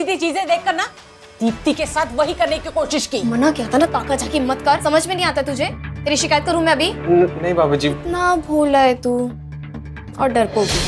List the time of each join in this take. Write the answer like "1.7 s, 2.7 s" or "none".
3.2 s, 4.8 s, 8.0 s